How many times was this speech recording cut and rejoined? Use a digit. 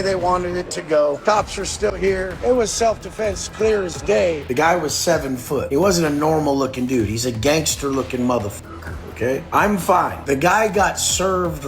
5